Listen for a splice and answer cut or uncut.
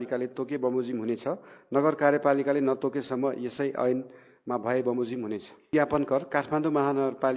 cut